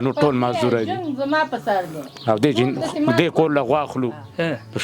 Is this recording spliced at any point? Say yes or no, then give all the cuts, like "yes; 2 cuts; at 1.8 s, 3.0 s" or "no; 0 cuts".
no; 0 cuts